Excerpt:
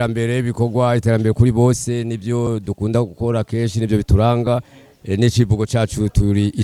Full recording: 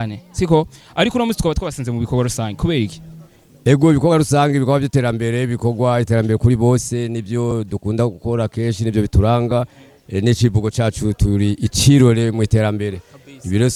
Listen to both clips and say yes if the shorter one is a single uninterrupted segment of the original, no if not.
yes